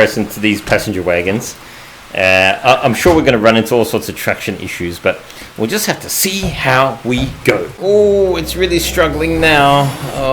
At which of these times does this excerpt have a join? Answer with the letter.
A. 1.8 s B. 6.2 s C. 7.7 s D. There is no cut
C